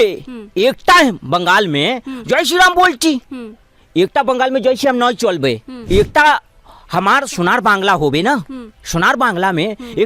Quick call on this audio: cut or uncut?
cut